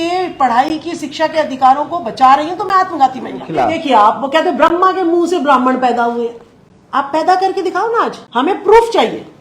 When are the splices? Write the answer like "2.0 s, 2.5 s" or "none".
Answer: 3.7 s, 8.2 s